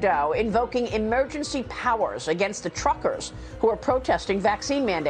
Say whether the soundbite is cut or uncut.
uncut